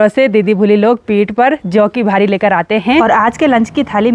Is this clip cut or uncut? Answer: cut